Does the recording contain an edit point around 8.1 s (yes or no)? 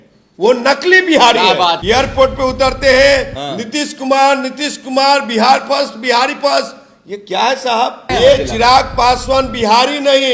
yes